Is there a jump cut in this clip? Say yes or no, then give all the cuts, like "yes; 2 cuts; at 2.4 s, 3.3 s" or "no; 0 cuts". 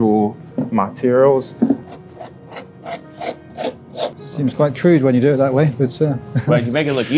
yes; 2 cuts; at 1.8 s, 4.2 s